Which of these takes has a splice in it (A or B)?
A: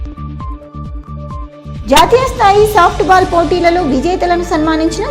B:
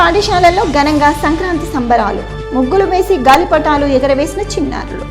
A